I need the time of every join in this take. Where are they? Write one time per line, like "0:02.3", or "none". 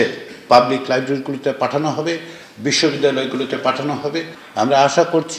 0:04.4